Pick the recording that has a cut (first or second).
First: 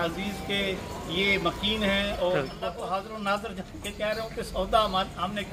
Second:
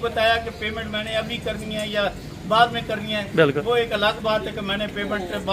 first